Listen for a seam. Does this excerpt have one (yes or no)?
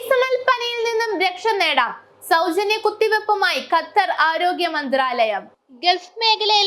no